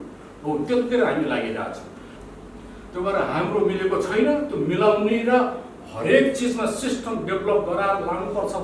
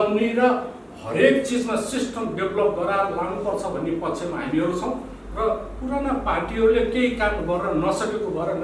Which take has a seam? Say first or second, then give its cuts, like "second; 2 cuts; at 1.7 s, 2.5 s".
first; 1 cut; at 1.8 s